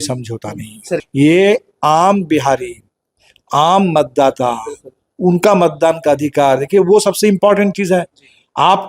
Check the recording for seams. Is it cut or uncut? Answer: cut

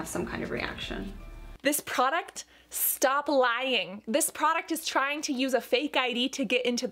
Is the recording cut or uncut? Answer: cut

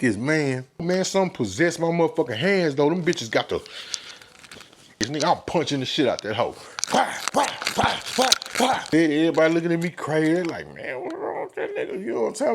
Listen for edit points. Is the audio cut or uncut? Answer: cut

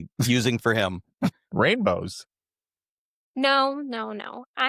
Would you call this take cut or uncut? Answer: uncut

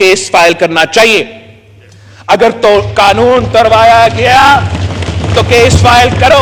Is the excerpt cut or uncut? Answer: uncut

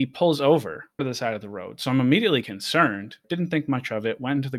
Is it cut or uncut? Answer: cut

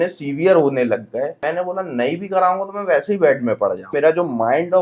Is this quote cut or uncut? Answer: cut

